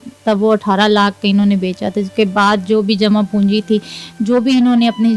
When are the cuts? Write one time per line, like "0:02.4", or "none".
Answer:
none